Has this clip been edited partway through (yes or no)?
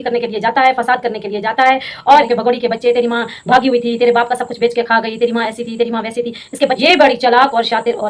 yes